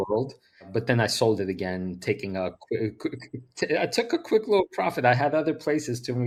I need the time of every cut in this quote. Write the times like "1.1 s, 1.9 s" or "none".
none